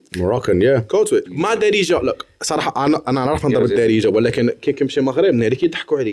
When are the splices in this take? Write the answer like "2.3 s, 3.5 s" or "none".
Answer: 1.3 s

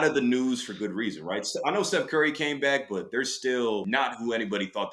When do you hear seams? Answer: 3.8 s

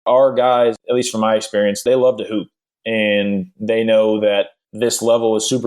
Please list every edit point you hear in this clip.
0.8 s, 1.8 s, 4.6 s

